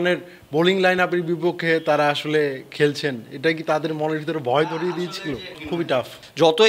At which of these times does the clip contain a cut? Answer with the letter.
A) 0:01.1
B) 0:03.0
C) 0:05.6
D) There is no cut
C